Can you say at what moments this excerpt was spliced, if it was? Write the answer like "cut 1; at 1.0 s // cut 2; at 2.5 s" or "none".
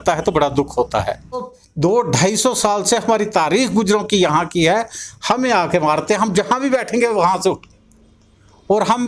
cut 1; at 1.6 s